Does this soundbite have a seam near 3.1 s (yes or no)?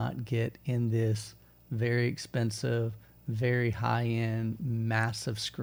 no